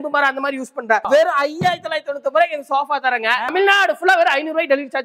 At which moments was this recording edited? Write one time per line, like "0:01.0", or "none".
0:01.1
0:03.5